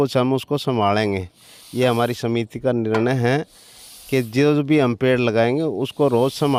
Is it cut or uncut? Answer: uncut